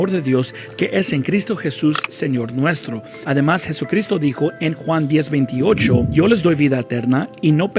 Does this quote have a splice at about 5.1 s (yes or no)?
no